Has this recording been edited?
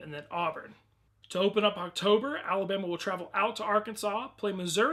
no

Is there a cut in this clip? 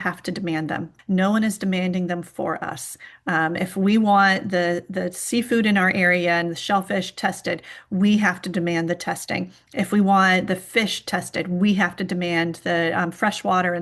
yes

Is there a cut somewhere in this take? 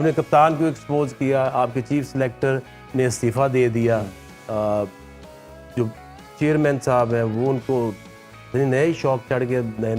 no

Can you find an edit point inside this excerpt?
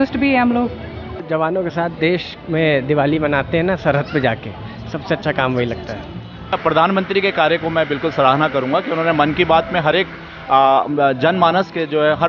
yes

